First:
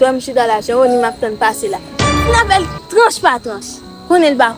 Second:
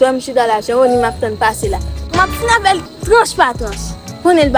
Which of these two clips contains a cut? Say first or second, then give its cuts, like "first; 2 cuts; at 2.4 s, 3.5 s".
first; 1 cut; at 2.1 s